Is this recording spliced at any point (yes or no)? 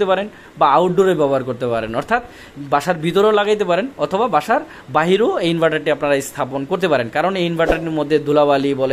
no